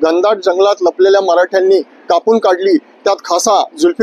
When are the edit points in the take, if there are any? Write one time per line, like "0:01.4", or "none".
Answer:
none